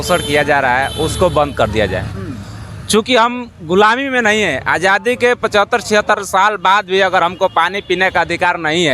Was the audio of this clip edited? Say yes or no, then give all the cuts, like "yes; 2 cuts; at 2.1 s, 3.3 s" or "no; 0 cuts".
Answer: no; 0 cuts